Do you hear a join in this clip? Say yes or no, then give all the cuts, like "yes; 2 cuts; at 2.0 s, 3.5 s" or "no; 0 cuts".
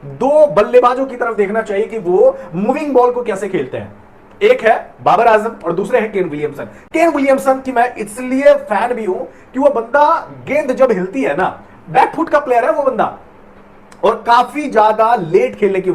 no; 0 cuts